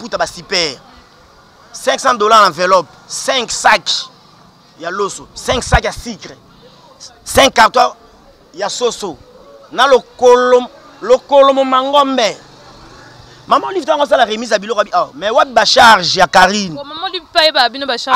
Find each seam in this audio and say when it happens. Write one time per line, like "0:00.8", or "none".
none